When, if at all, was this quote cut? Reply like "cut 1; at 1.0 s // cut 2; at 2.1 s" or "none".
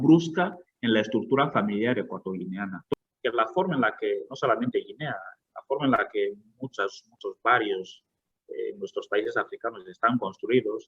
cut 1; at 2.8 s